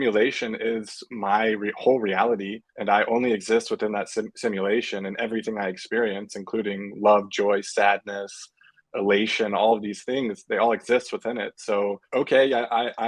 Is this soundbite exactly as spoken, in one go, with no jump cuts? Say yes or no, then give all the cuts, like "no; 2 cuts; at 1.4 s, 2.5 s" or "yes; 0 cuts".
yes; 0 cuts